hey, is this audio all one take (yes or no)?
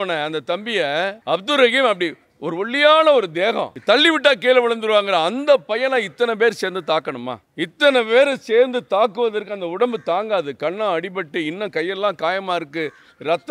no